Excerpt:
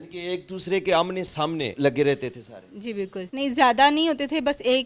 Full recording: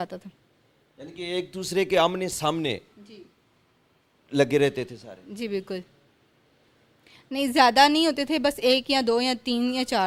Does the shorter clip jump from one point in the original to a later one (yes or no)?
yes